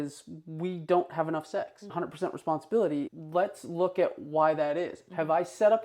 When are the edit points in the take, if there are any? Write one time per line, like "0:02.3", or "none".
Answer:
0:01.9
0:03.1